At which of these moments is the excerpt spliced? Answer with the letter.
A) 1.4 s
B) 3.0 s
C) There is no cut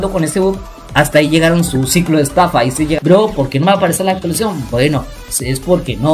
B